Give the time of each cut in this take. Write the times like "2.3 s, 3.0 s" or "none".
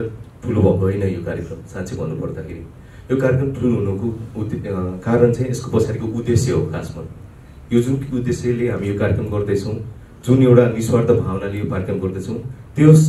none